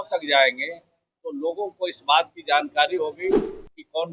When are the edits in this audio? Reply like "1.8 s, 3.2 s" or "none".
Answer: none